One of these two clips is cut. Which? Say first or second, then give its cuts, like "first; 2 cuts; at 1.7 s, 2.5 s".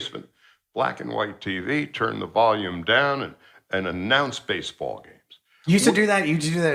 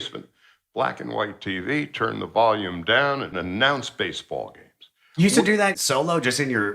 second; 2 cuts; at 3.3 s, 5.7 s